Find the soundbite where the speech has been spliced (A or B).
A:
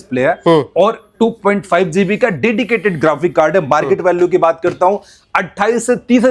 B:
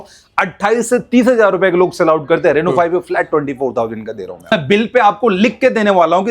B